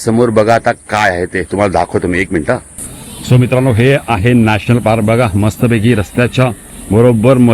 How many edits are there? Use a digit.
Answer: 1